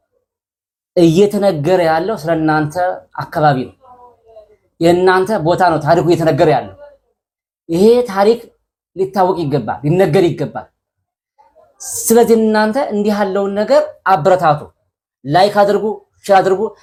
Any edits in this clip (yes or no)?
no